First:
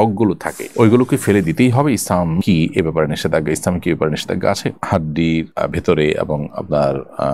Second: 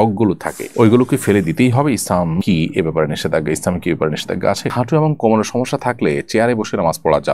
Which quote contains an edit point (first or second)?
second